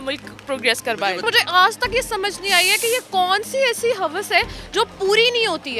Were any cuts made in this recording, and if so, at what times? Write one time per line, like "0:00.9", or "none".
0:01.2

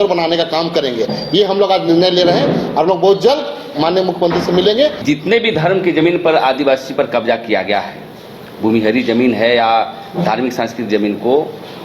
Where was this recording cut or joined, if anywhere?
0:05.0

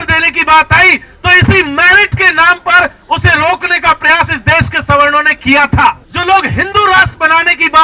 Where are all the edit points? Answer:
0:06.1

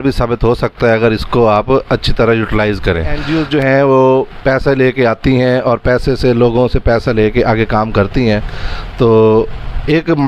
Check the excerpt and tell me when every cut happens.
0:03.2

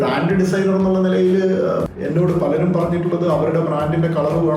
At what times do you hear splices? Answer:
0:01.8

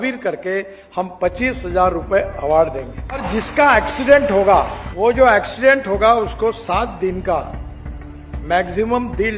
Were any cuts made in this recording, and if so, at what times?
0:03.3
0:04.8

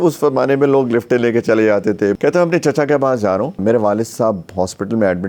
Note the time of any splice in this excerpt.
0:02.2
0:03.6

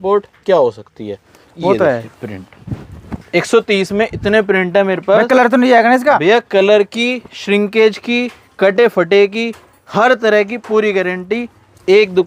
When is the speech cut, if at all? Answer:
none

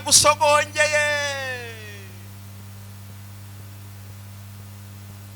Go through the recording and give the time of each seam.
none

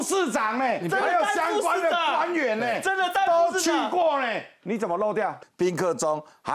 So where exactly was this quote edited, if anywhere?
0:05.4

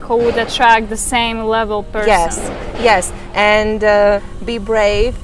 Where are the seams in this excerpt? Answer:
0:04.3

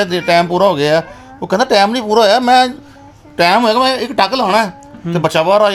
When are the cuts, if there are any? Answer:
none

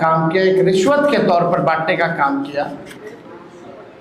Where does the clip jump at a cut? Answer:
none

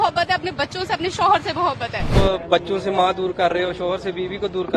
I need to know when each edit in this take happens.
0:02.1

